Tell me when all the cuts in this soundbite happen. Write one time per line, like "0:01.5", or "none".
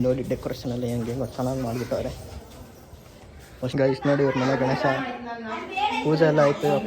0:03.7